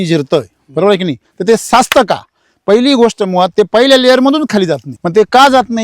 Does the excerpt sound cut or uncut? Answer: cut